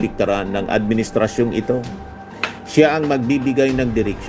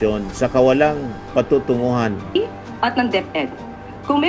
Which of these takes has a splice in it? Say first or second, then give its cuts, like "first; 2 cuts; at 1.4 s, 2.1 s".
second; 1 cut; at 2.4 s